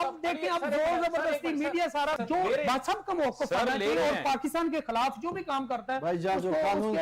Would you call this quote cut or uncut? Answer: cut